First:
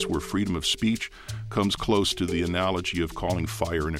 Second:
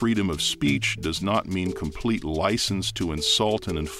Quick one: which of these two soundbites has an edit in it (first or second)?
first